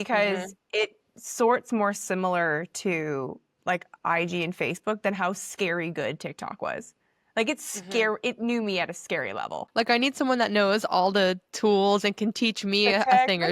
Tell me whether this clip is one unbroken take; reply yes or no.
no